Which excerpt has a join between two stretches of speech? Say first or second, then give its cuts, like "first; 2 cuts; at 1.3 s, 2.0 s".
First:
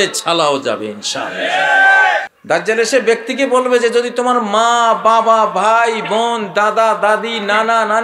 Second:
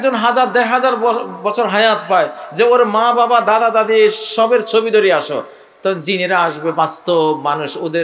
first; 1 cut; at 2.3 s